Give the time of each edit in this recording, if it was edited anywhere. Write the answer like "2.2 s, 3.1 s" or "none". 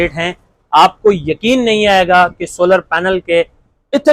none